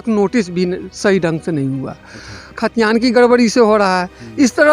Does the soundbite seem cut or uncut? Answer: cut